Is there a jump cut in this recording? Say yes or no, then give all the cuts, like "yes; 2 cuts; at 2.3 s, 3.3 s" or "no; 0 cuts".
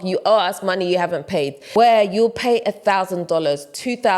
yes; 1 cut; at 1.6 s